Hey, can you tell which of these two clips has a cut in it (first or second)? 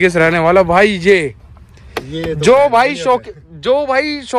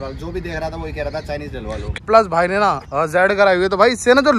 second